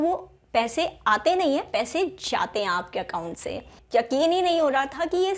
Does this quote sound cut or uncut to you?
cut